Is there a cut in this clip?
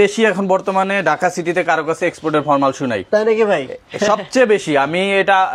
no; 0 cuts

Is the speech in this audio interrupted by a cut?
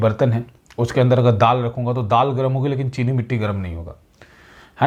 no; 0 cuts

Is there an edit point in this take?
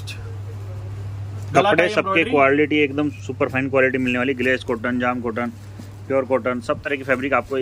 no; 0 cuts

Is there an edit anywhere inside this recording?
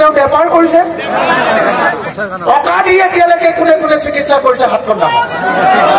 no; 0 cuts

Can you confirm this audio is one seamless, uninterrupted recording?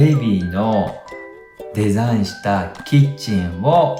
yes; 0 cuts

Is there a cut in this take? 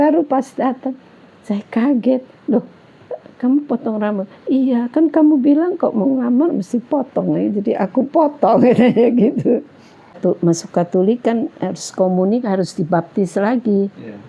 yes; 1 cut; at 10.1 s

